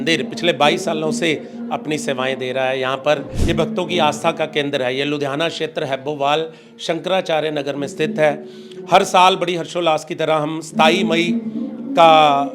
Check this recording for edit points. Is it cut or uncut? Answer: cut